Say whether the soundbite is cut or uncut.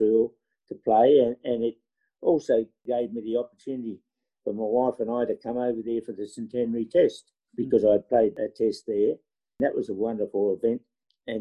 cut